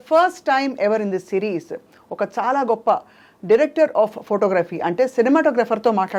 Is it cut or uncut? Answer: uncut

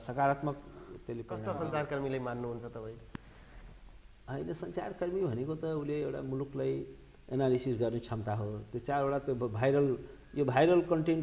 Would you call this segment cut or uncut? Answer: cut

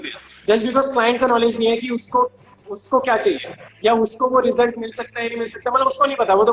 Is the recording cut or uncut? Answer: uncut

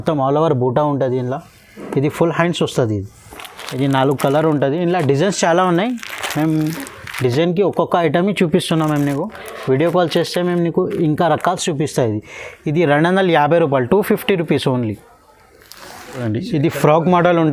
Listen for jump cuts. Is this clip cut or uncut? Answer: uncut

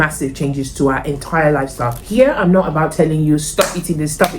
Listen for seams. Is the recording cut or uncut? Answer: cut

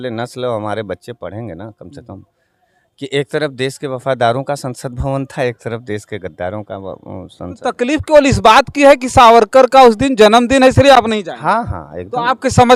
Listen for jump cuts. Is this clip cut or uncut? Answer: uncut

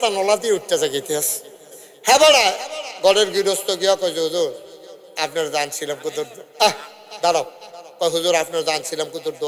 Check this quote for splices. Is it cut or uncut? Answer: uncut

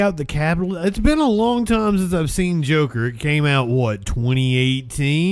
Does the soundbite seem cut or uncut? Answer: uncut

